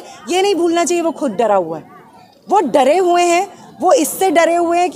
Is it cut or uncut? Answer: uncut